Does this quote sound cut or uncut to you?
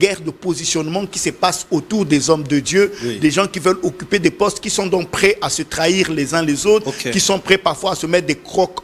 uncut